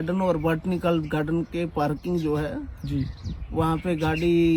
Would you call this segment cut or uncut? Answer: uncut